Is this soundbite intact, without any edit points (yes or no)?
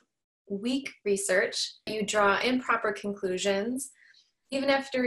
no